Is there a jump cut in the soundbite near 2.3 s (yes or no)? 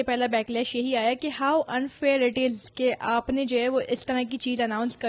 no